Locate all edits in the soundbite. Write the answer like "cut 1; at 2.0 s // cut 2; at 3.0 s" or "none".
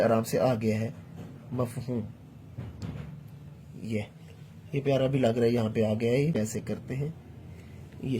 cut 1; at 6.4 s